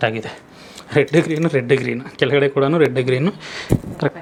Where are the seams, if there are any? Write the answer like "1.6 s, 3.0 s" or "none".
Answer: none